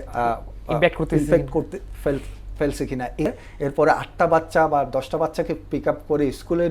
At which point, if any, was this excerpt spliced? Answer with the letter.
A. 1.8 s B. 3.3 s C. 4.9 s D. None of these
B